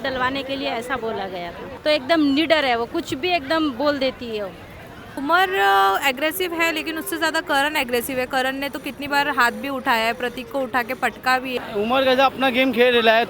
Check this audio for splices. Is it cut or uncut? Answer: cut